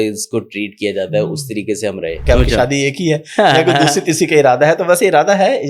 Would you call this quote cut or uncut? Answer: cut